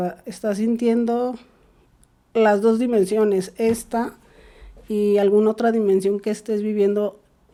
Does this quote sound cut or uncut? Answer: uncut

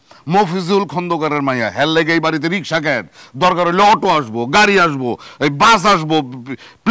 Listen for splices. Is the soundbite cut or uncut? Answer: uncut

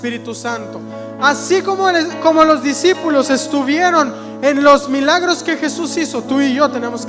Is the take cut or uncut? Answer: uncut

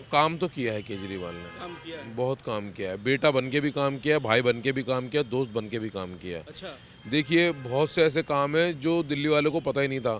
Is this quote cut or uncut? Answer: uncut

